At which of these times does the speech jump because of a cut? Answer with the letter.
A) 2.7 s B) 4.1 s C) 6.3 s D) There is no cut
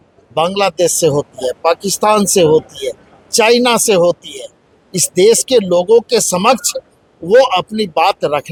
D